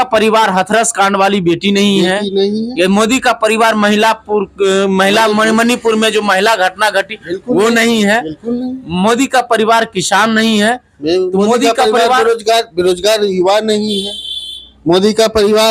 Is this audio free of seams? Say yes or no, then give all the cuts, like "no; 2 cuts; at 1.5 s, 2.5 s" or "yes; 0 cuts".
yes; 0 cuts